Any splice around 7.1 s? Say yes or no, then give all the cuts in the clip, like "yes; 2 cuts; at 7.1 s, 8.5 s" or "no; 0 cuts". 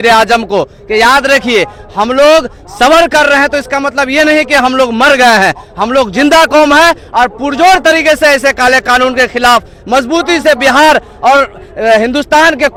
no; 0 cuts